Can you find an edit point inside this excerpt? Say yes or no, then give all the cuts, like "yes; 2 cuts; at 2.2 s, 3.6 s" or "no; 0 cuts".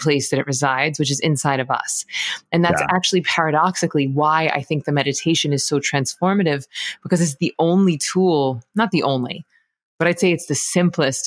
no; 0 cuts